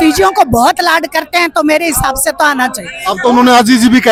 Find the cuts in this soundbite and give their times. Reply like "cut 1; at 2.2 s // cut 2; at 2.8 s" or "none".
none